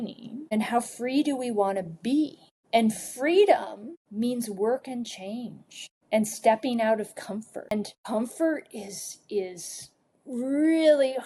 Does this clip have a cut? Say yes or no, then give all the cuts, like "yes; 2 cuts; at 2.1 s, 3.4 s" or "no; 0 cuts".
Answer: yes; 1 cut; at 7.7 s